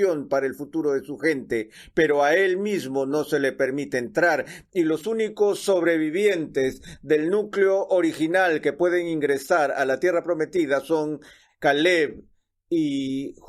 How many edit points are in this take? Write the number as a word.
one